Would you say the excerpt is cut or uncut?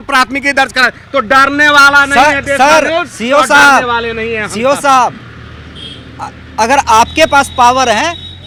uncut